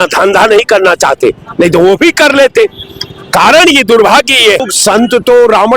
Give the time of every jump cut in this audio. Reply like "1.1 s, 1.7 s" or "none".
4.7 s